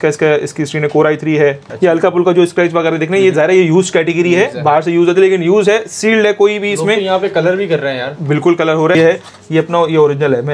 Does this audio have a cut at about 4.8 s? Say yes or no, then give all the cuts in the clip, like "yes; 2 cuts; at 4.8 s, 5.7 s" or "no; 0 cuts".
no; 2 cuts; at 1.6 s, 9.0 s